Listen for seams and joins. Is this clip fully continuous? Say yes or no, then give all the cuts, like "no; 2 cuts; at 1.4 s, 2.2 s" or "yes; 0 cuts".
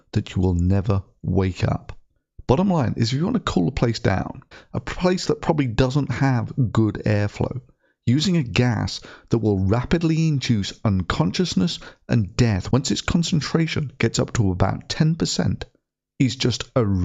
yes; 0 cuts